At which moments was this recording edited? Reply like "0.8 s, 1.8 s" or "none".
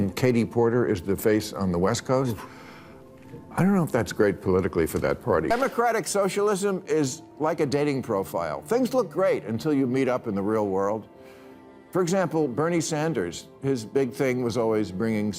5.5 s